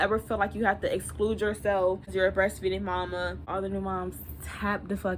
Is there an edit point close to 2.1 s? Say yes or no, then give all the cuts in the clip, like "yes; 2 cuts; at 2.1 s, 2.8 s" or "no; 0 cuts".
yes; 2 cuts; at 2.1 s, 3.5 s